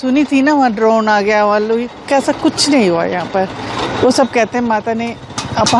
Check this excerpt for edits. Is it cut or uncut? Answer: uncut